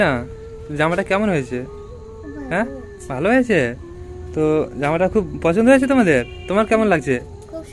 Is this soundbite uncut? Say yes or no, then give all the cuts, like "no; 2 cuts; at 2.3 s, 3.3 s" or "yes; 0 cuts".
yes; 0 cuts